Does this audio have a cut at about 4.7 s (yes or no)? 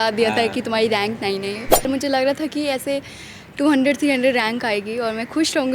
no